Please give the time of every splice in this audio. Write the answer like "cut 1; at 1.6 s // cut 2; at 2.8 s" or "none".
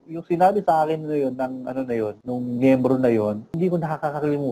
cut 1; at 2.2 s // cut 2; at 3.5 s